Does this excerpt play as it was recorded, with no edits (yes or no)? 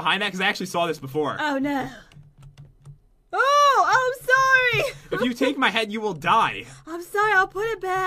no